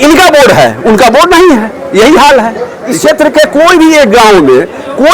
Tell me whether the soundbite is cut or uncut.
cut